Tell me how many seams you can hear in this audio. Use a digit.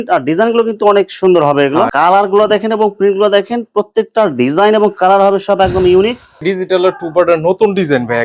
2